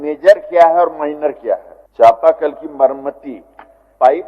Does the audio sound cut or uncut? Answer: cut